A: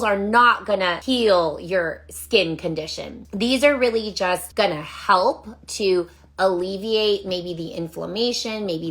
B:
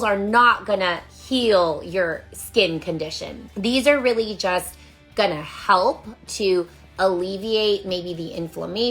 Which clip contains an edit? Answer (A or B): A